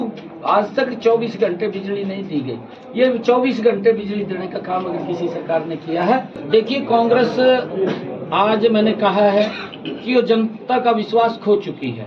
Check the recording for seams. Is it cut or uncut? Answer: cut